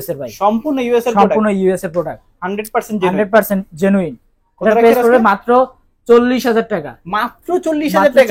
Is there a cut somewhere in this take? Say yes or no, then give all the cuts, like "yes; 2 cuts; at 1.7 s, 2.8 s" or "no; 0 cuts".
no; 0 cuts